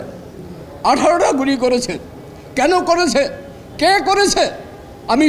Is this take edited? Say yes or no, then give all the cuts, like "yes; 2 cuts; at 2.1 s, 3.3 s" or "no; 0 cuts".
no; 0 cuts